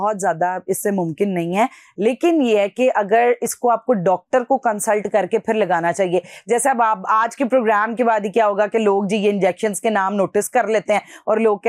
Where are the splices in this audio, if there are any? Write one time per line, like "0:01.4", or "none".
none